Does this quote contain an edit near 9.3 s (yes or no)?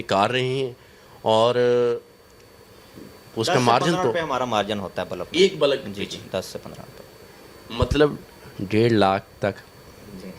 no